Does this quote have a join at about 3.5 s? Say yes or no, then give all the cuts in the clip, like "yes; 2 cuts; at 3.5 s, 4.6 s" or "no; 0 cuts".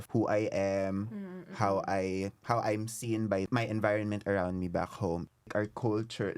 yes; 3 cuts; at 2.4 s, 3.5 s, 5.3 s